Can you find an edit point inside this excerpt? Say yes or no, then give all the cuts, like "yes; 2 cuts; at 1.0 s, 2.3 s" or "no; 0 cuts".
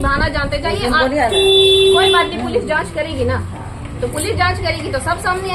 no; 0 cuts